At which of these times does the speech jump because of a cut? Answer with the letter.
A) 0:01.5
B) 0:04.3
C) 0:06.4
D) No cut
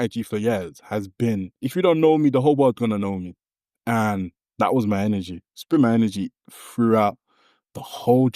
A